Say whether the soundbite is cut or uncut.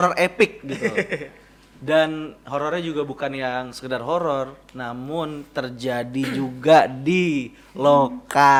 uncut